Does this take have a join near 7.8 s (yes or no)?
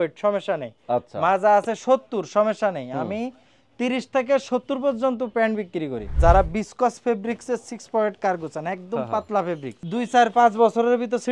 no